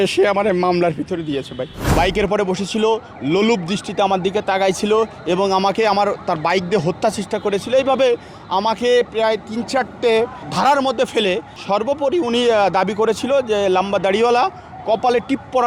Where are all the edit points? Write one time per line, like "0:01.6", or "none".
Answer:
0:01.8
0:10.4
0:11.5